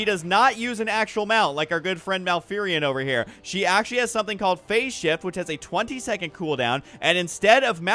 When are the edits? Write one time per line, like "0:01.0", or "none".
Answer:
0:04.5